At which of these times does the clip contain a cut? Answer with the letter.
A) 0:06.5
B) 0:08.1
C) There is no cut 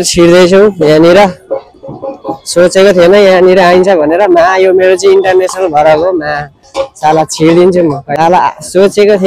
B